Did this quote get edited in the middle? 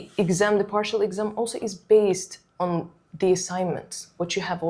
no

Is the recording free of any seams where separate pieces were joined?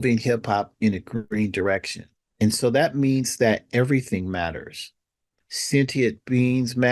no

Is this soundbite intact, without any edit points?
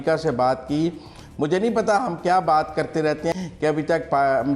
no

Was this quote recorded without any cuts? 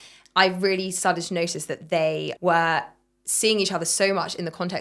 no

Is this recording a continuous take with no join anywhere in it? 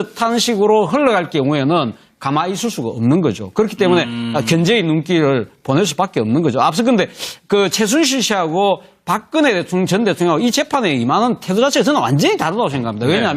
no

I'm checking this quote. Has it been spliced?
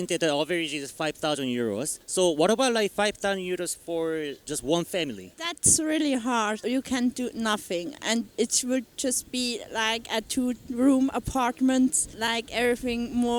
no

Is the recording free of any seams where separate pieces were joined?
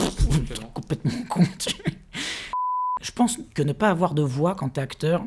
no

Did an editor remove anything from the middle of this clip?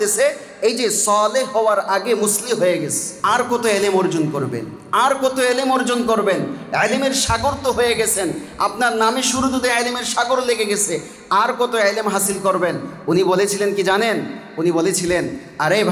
yes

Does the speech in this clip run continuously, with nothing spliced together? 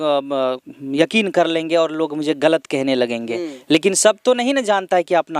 yes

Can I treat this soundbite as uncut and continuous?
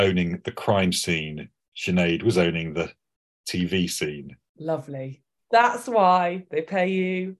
yes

